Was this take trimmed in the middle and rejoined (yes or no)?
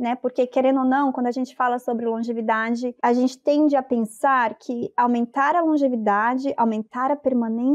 yes